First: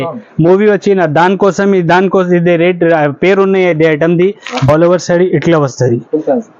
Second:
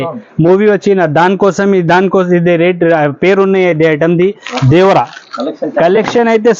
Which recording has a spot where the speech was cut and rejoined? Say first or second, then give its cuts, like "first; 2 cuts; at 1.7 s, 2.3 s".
first; 1 cut; at 4.7 s